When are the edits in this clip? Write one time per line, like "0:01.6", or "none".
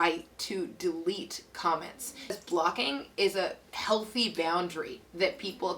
0:02.4